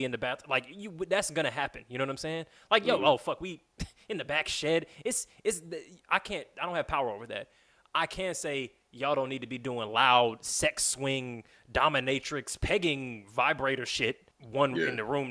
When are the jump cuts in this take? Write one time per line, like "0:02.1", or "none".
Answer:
0:14.3